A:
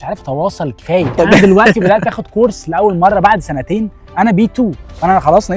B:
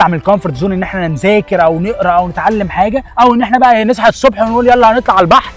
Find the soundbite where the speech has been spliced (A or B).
A